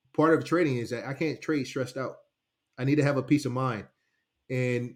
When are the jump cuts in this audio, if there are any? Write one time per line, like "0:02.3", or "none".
none